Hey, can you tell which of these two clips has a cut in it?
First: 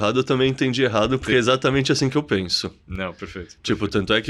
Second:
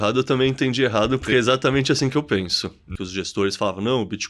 second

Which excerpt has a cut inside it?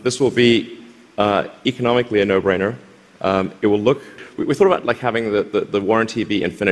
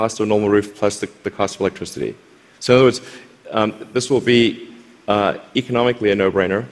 first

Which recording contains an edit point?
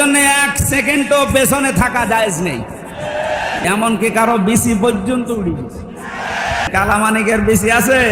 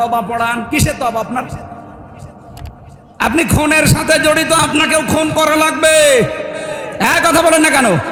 first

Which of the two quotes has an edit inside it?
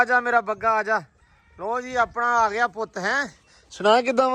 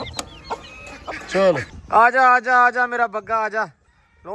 second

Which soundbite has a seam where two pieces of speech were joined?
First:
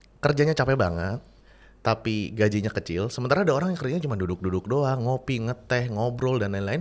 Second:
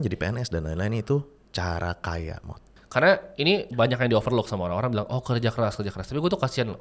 second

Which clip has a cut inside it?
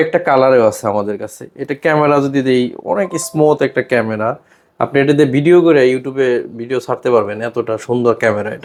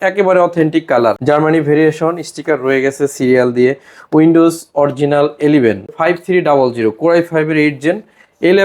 second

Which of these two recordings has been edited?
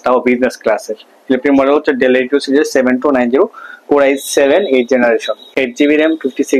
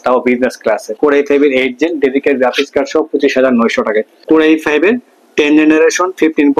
second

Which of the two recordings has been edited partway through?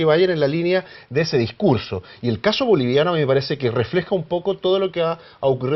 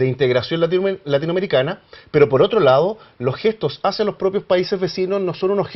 first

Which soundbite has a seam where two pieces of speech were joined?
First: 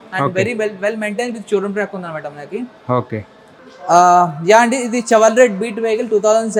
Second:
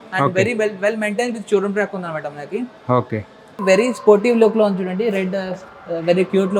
second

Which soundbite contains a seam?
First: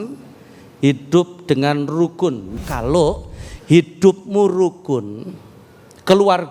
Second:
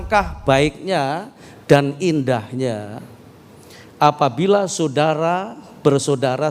first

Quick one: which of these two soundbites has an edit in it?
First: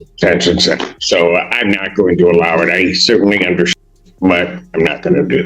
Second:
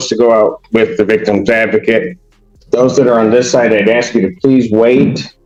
first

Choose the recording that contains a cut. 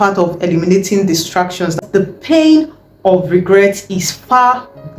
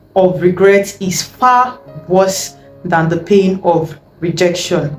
first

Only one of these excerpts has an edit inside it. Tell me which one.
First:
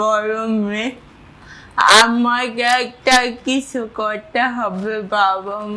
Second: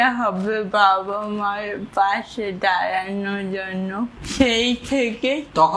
second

